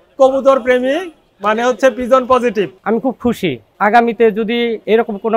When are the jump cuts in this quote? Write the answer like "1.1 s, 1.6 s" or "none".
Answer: 2.7 s